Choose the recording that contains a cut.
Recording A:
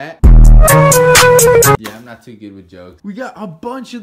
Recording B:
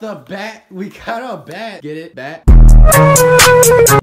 A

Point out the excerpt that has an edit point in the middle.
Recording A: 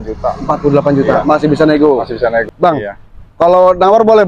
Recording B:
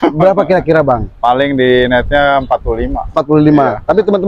A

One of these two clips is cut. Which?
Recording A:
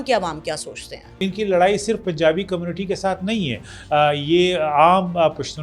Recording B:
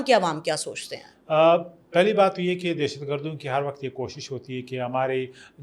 A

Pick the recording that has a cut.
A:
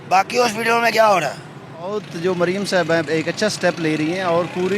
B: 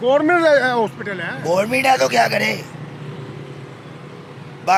A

